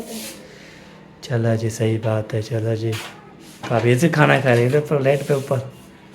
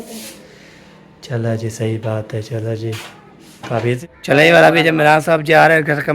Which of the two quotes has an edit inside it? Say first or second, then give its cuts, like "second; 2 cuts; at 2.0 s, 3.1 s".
second; 1 cut; at 4.0 s